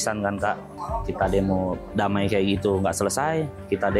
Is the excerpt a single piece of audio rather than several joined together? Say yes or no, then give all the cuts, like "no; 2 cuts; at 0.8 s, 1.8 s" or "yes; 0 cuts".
yes; 0 cuts